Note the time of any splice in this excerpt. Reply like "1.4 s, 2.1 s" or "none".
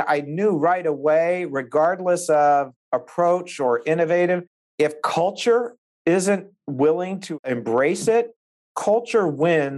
7.2 s